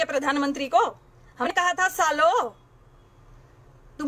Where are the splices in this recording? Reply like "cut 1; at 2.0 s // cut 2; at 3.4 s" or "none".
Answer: cut 1; at 1.5 s